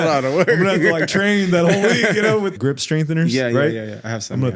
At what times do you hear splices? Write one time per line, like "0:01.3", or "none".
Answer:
0:02.6